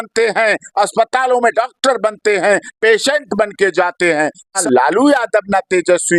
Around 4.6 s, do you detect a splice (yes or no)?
yes